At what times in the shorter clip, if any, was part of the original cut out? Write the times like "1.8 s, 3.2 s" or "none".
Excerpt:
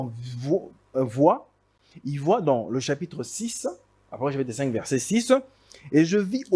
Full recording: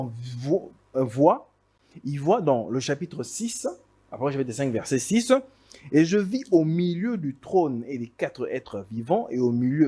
none